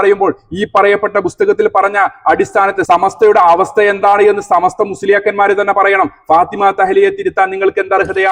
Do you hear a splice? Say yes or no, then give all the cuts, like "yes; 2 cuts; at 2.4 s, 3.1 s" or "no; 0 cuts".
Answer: no; 0 cuts